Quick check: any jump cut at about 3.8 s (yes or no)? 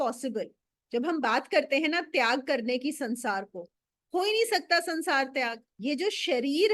no